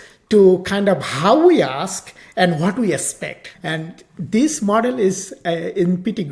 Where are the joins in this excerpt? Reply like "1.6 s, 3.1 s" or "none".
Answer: 3.4 s